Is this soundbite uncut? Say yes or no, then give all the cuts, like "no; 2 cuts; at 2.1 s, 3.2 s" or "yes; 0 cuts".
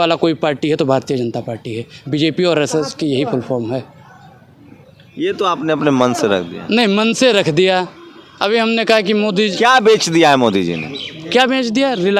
yes; 0 cuts